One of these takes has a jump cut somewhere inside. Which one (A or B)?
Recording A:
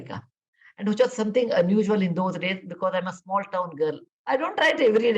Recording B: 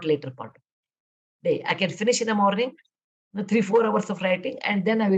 A